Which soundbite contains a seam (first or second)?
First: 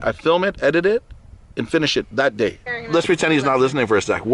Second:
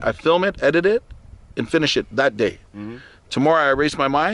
first